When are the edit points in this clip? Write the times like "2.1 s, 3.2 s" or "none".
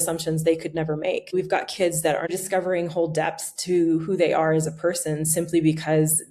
1.3 s, 2.3 s